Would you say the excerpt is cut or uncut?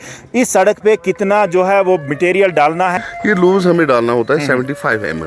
cut